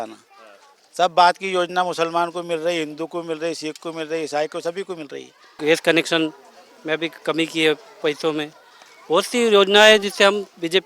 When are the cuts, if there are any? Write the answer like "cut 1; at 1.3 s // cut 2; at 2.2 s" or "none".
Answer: cut 1; at 5.6 s